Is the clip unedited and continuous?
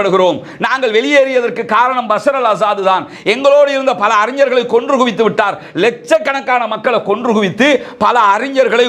yes; 0 cuts

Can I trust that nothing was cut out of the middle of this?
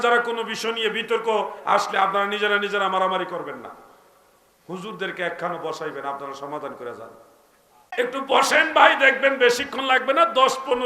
no; 1 cut; at 7.9 s

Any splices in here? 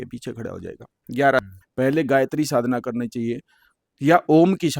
yes; 1 cut; at 1.5 s

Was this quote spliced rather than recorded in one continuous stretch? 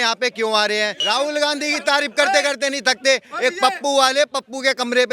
yes; 1 cut; at 1.0 s

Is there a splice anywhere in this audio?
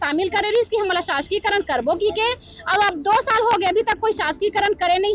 no; 0 cuts

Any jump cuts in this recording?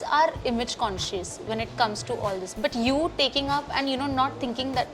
no; 0 cuts

